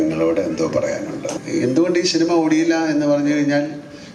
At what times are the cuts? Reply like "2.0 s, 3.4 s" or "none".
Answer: 1.4 s